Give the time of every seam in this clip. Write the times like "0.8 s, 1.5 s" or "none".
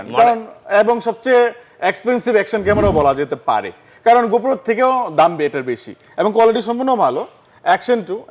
none